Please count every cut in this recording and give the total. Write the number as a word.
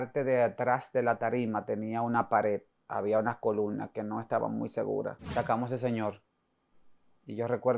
one